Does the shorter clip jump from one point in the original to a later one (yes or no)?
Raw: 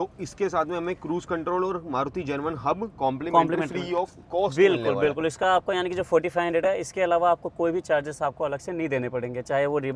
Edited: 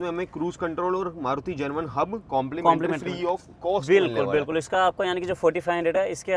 no